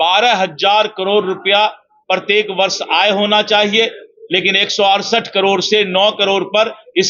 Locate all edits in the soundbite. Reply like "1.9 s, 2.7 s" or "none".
none